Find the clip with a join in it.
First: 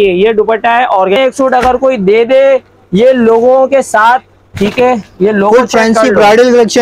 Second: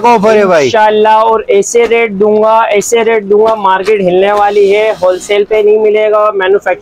first; 1 cut; at 1.2 s

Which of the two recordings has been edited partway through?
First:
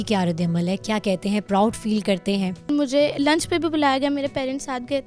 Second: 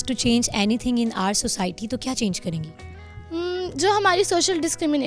first; 1 cut; at 2.7 s

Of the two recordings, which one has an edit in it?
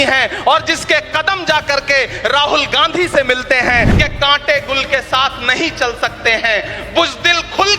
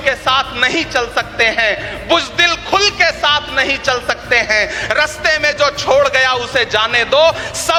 first; 1 cut; at 3.9 s

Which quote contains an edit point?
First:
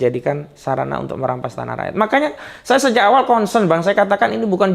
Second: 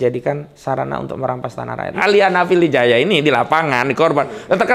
second; 1 cut; at 1.9 s

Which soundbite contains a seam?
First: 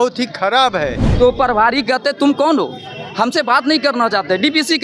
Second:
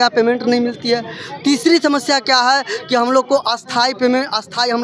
first; 1 cut; at 1.0 s

